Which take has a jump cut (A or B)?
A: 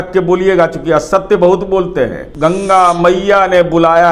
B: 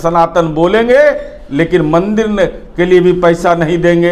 A